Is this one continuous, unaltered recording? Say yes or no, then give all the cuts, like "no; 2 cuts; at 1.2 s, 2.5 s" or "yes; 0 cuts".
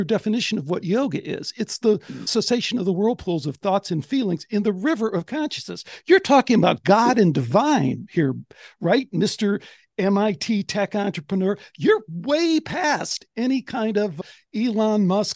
yes; 0 cuts